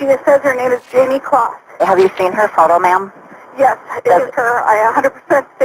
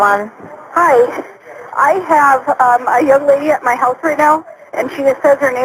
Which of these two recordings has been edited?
first; 1 cut; at 1.8 s

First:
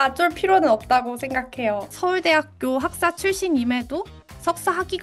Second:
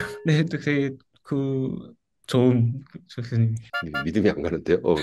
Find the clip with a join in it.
first; 1 cut; at 1.8 s

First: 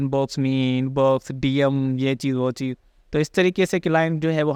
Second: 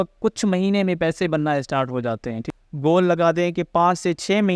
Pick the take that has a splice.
second; 1 cut; at 2.5 s

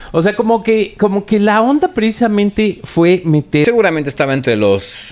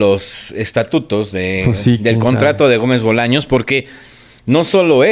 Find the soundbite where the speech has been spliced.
first; 1 cut; at 3.6 s

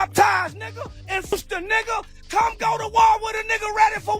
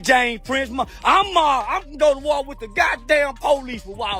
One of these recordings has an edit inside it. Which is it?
first; 1 cut; at 1.3 s

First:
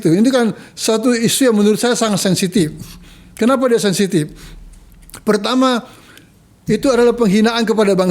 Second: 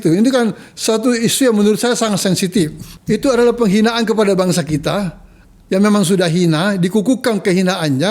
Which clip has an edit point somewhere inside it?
second; 1 cut; at 2.9 s

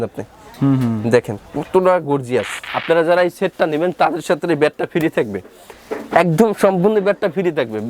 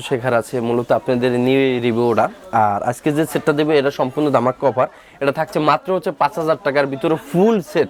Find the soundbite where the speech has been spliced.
first; 1 cut; at 2.7 s

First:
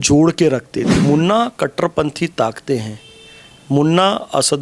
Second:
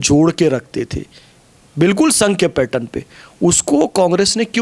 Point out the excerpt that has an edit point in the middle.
first; 1 cut; at 0.9 s

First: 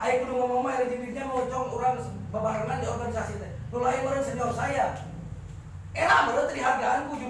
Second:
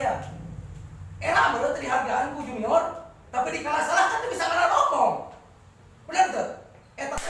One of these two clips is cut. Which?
second; 1 cut; at 5.5 s

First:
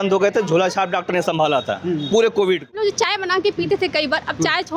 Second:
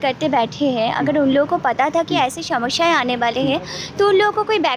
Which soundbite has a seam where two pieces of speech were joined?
first; 1 cut; at 2.8 s

